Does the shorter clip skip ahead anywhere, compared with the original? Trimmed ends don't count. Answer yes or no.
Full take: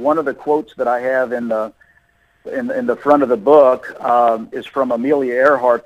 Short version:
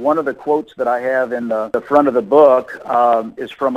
yes